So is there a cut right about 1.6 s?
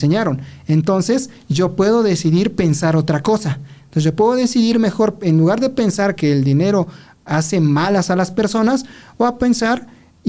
no; 0 cuts

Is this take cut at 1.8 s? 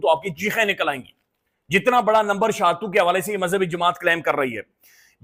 no; 0 cuts

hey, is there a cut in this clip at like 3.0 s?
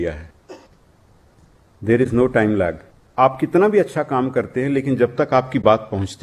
yes; 1 cut; at 3.0 s

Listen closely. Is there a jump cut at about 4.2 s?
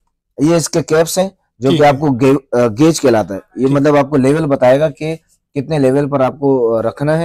no; 0 cuts

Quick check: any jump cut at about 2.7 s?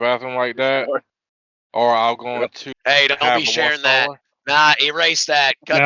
yes; 1 cut; at 2.7 s

